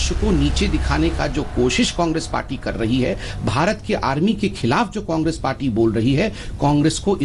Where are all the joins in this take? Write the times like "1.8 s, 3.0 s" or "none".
none

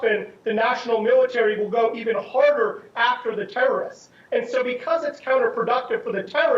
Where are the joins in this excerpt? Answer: 5.5 s

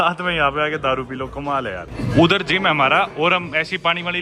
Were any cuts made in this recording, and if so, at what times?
none

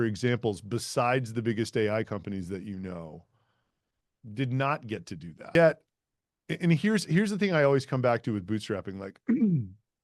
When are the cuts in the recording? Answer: 5.5 s

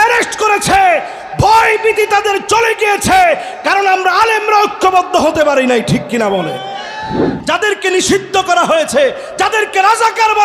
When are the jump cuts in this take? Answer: 7.3 s

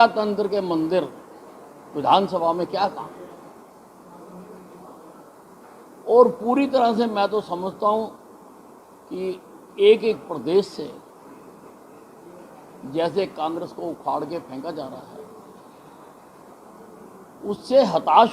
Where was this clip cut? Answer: 3.6 s

